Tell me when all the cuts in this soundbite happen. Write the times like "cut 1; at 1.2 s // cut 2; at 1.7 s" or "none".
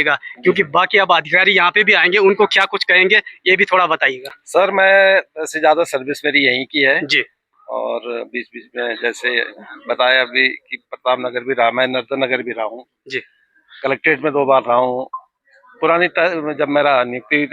none